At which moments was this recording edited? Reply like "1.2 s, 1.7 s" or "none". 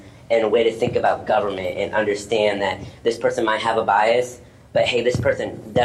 none

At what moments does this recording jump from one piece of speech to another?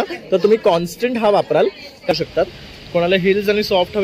2.1 s

